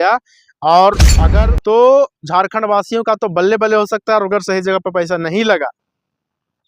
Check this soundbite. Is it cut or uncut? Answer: cut